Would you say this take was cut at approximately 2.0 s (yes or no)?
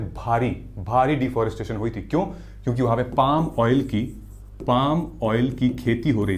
no